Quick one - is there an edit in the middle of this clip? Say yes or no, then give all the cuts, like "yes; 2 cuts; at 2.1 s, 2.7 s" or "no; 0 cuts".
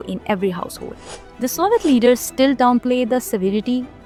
no; 0 cuts